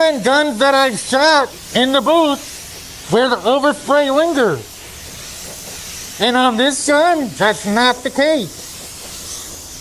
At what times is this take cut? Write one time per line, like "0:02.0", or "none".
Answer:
none